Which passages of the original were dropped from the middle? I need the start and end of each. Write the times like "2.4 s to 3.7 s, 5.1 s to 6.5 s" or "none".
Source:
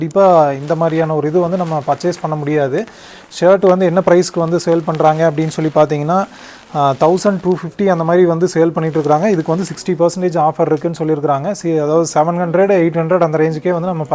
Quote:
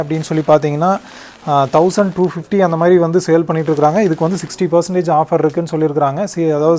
none